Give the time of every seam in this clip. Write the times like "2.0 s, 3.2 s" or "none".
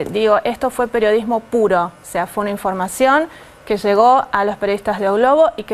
none

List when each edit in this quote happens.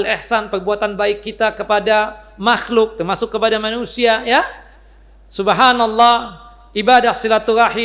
none

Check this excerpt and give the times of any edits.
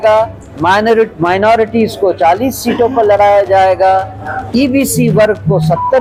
none

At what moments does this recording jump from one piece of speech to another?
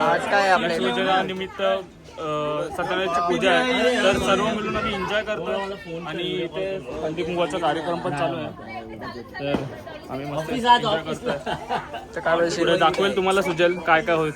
none

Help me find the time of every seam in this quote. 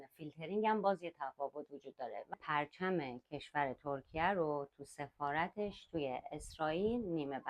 2.3 s

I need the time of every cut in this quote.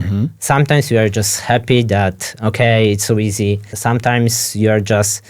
3.7 s

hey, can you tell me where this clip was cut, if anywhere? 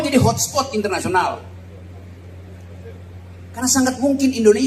none

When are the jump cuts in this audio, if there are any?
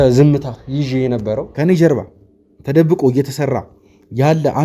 1.5 s

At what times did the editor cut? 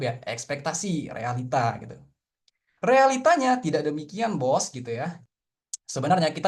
5.3 s

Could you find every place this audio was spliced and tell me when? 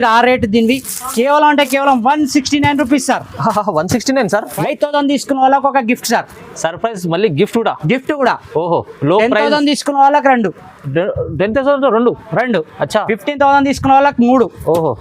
4.5 s

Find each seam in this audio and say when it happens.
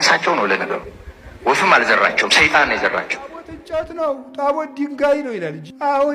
3.5 s

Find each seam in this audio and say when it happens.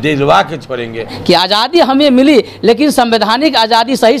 1.0 s

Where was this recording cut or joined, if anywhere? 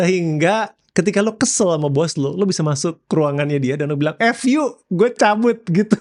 none

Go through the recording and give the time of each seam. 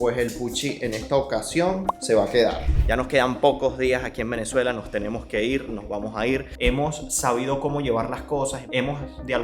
2.6 s, 6.5 s

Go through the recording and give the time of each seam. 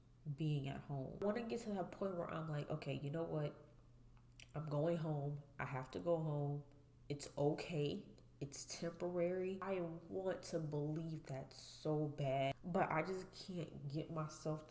1.2 s, 9.6 s, 12.5 s

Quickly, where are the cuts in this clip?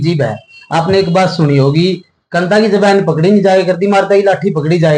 none

